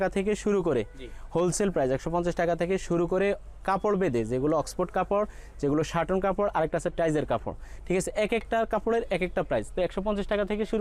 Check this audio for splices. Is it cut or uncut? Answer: uncut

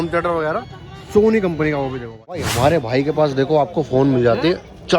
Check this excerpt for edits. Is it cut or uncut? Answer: cut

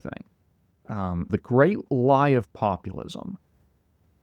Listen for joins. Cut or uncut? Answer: cut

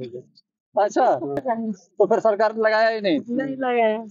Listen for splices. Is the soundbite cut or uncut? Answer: cut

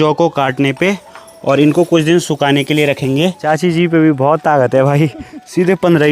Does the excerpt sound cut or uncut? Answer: cut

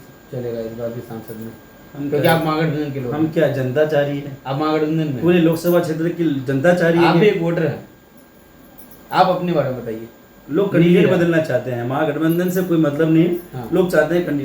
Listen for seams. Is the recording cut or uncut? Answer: uncut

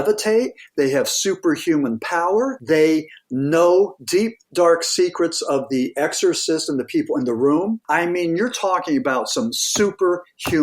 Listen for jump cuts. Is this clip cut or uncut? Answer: cut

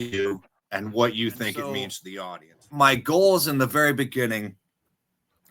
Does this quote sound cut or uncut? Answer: cut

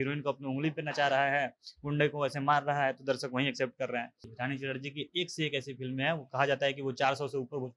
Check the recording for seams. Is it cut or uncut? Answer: cut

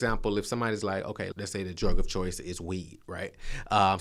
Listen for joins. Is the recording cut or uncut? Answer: cut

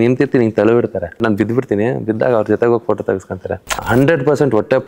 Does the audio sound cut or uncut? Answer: cut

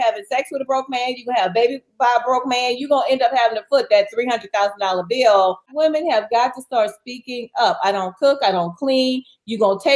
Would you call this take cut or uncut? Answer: cut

